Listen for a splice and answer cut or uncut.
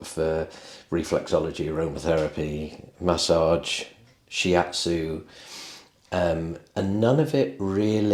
uncut